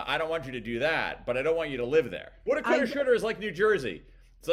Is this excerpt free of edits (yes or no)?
no